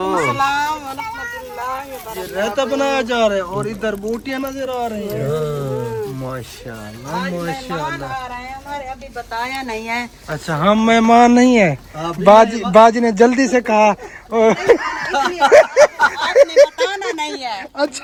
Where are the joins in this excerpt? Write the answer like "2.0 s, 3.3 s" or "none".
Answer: none